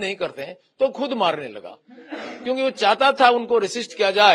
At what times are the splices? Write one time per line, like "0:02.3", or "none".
none